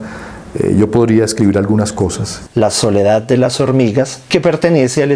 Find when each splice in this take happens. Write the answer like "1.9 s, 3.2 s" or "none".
2.3 s, 4.2 s